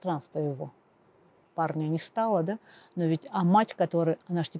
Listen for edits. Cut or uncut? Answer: cut